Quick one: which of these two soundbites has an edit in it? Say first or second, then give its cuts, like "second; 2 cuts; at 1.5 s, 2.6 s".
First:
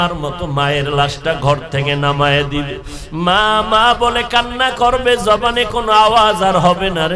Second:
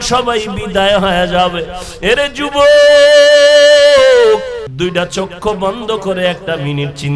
second; 1 cut; at 4.7 s